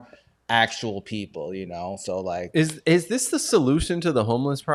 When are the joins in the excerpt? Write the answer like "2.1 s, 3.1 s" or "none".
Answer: none